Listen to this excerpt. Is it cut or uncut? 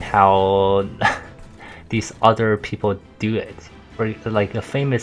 uncut